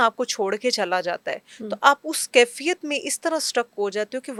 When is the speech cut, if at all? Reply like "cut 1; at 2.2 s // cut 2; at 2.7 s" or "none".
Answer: none